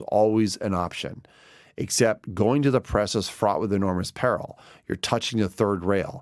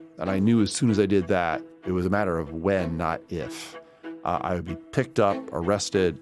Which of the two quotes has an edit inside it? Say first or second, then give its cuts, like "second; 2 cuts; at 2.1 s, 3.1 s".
second; 1 cut; at 1.7 s